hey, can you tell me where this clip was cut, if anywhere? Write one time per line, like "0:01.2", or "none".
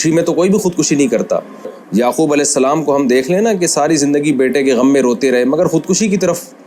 0:01.8

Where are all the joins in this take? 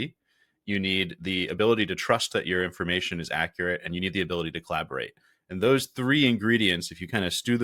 none

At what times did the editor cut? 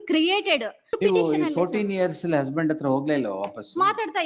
0:01.0

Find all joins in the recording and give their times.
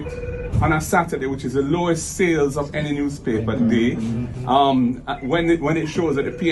0:03.9

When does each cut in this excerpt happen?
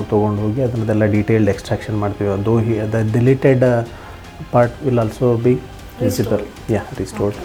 none

